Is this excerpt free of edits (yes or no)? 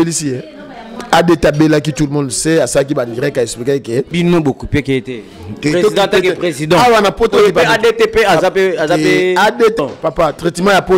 no